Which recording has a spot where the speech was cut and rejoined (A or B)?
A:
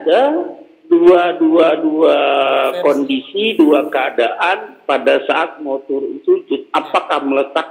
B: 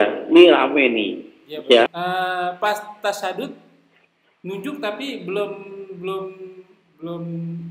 B